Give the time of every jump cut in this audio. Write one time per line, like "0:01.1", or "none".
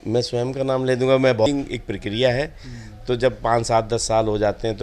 0:01.5